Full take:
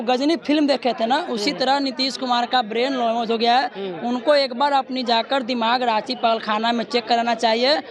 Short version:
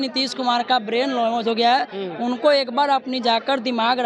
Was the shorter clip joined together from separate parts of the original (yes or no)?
no